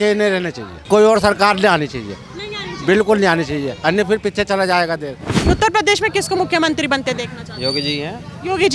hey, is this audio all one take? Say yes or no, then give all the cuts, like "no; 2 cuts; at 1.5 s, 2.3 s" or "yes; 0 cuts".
no; 2 cuts; at 0.8 s, 5.4 s